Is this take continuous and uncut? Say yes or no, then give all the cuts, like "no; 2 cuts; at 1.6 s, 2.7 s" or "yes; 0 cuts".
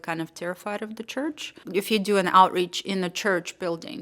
no; 1 cut; at 1.6 s